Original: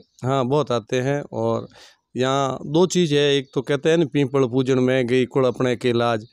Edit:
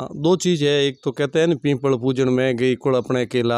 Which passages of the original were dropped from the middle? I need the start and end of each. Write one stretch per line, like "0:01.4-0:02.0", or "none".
none